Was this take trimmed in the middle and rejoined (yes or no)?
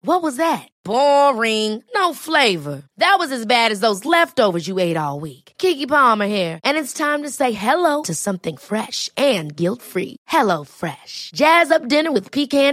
no